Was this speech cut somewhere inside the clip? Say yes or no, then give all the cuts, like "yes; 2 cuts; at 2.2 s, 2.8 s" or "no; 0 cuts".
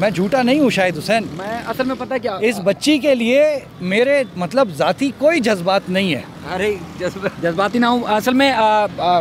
yes; 3 cuts; at 3.7 s, 6.3 s, 7.4 s